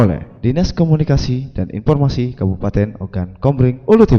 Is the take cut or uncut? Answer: uncut